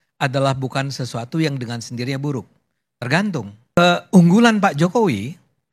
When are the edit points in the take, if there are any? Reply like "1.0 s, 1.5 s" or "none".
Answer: 3.8 s